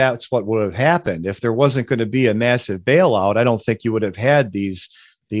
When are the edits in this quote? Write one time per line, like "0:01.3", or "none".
none